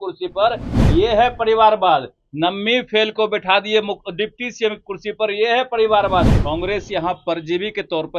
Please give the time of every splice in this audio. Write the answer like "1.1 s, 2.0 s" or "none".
6.4 s